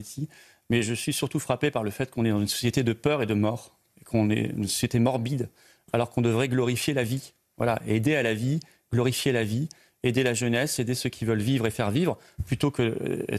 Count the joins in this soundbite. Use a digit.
0